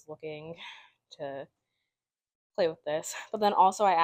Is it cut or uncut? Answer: uncut